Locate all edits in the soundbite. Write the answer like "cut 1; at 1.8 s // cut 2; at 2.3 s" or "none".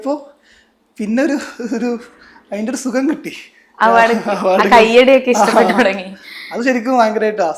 none